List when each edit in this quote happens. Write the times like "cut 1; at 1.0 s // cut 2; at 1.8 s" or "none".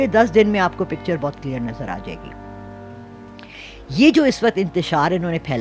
none